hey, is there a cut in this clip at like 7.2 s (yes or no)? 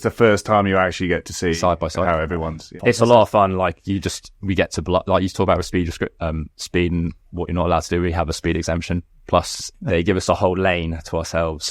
no